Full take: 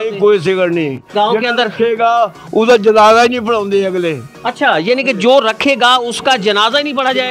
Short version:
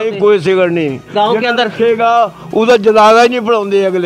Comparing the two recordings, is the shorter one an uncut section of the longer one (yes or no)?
yes